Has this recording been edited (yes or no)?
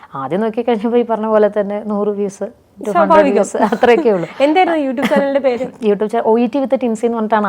no